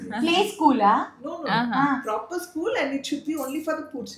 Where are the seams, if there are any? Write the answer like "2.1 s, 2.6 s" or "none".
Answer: none